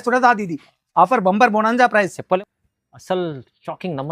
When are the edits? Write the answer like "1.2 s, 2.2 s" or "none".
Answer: 2.4 s